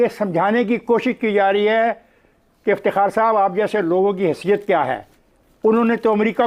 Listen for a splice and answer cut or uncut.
uncut